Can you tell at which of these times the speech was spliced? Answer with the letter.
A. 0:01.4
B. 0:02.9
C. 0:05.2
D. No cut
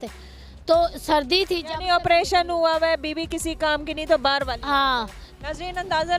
C